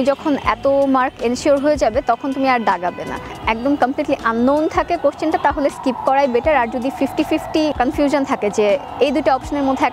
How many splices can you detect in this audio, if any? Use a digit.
2